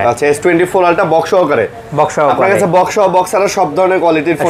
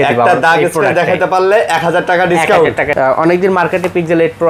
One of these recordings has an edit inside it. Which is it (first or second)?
second